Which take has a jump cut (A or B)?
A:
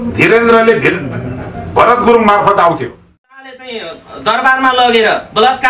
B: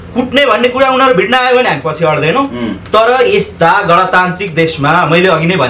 A